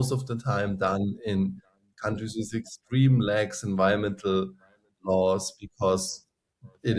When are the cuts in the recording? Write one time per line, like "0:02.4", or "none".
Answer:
none